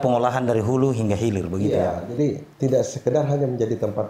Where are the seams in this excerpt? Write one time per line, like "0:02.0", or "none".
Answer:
none